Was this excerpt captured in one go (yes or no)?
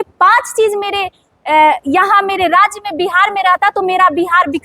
yes